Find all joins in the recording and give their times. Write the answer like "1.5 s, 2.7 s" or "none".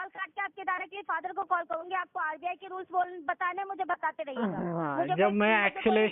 none